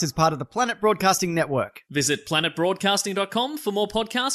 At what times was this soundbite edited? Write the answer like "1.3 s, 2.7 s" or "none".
none